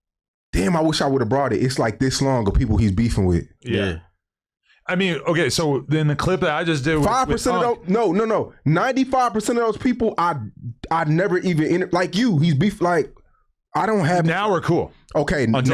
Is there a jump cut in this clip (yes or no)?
no